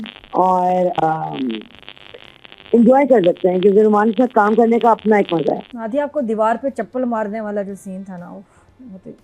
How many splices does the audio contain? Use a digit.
2